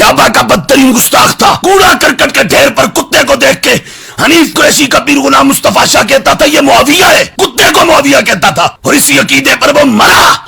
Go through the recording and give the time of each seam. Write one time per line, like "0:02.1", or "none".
none